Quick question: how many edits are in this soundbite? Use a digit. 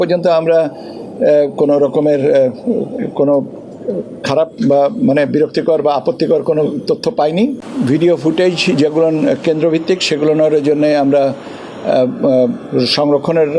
1